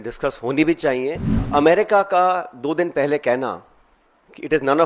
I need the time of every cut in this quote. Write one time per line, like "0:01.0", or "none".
0:01.3